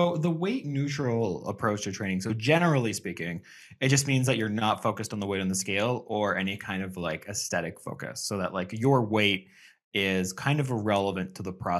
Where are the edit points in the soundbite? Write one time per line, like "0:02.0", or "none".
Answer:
none